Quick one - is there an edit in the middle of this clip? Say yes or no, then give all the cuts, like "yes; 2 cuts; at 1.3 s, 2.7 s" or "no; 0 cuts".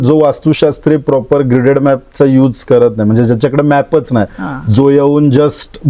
no; 0 cuts